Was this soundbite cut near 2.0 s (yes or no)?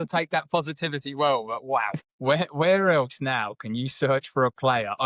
yes